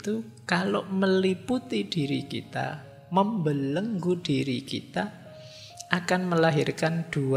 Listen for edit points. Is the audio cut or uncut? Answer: uncut